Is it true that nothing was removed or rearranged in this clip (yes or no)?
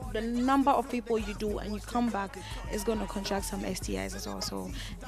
yes